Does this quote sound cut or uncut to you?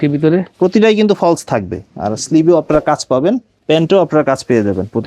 cut